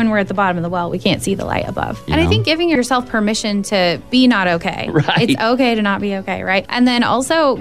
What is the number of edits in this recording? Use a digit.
1